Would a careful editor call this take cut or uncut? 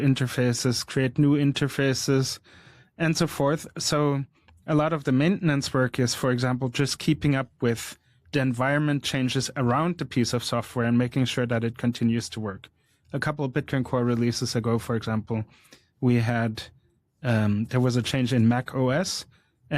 uncut